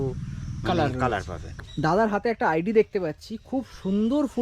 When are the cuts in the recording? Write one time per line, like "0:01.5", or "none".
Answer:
0:01.4